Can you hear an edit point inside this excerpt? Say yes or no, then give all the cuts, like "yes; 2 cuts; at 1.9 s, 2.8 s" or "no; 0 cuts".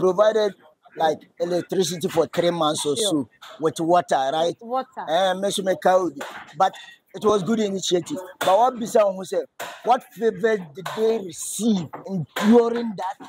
yes; 1 cut; at 12.0 s